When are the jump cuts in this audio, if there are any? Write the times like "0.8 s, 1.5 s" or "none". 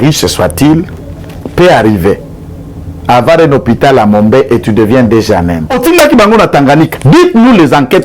5.7 s